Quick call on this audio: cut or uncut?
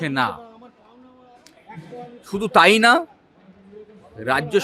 uncut